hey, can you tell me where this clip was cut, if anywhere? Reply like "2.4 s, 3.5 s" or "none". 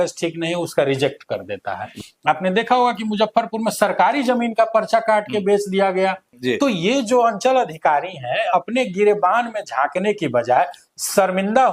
1.9 s, 6.3 s